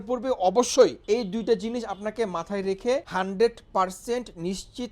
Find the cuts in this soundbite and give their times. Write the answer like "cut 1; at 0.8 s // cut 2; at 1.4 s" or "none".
cut 1; at 1.0 s // cut 2; at 3.1 s